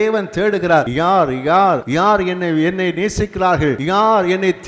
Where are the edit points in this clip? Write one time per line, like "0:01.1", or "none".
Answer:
0:00.9
0:01.9
0:03.8